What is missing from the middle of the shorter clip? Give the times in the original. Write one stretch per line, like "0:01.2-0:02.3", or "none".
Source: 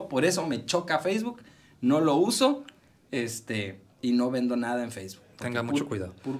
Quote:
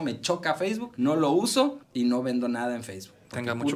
0:01.3-0:01.7
0:02.7-0:03.9